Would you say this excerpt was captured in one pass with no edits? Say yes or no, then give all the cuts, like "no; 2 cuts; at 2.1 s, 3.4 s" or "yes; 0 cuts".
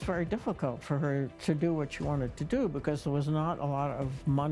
no; 1 cut; at 1.3 s